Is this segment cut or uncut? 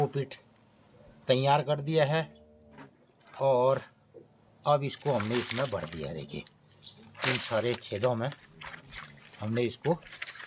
uncut